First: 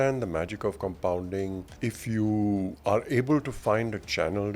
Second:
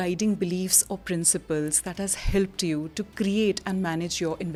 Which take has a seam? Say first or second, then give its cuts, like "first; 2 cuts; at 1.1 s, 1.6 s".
first; 2 cuts; at 1.7 s, 2.7 s